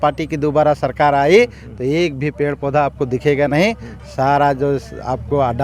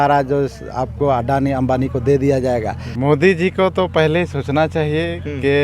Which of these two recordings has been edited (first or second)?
second